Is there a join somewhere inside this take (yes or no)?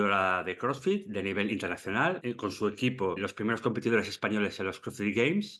yes